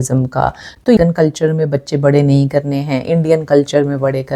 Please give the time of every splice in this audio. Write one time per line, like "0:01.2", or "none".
0:01.0